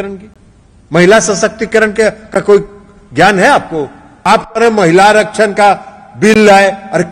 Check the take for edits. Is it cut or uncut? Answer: cut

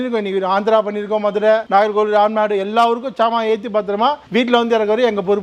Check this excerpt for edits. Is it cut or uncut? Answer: uncut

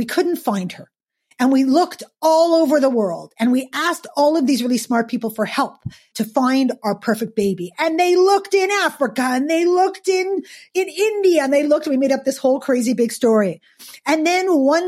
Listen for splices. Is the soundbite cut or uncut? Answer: cut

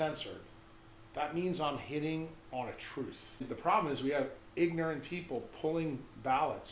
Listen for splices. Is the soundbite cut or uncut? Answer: cut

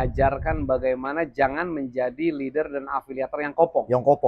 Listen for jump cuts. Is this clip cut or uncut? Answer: uncut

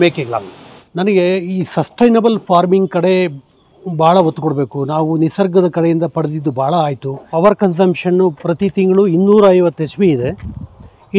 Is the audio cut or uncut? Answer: uncut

